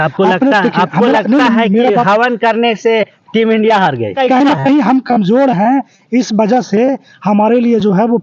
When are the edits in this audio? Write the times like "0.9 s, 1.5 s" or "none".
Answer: 4.1 s

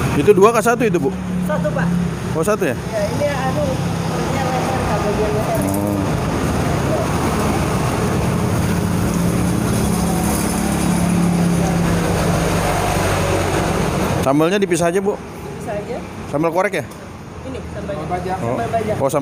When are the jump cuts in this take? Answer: none

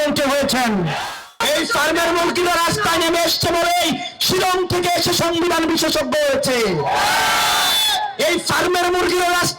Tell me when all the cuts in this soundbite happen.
1.3 s

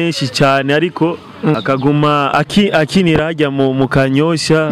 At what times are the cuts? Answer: 1.5 s, 2.3 s

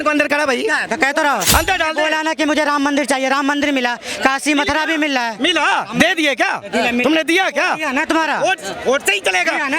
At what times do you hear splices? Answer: 1.5 s

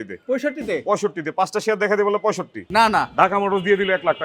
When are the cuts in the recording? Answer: 2.6 s

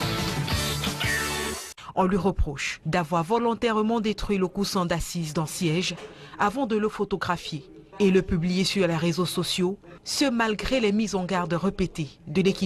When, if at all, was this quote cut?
none

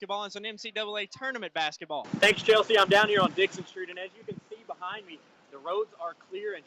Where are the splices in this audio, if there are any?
2.1 s

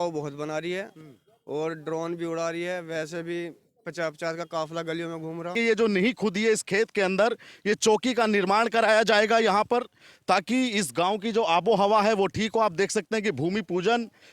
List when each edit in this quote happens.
5.5 s

